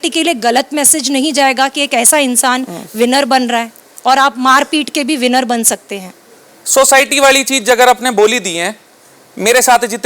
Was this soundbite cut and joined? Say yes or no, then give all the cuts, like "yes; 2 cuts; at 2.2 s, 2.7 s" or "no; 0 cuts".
no; 0 cuts